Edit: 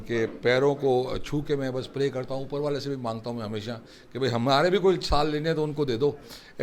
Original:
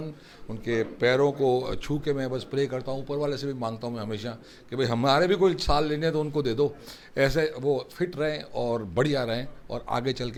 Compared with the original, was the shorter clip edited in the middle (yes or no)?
no